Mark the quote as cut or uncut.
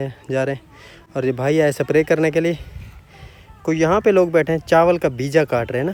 uncut